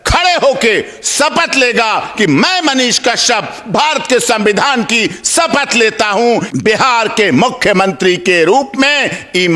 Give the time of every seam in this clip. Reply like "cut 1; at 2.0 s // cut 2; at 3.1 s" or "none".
cut 1; at 6.5 s